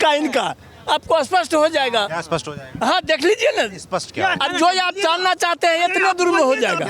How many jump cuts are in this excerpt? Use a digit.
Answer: 0